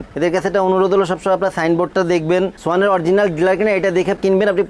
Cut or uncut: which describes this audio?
uncut